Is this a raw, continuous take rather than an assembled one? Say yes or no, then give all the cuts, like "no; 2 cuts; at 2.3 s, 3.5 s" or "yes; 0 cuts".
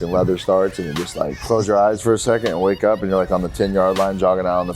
no; 1 cut; at 1.4 s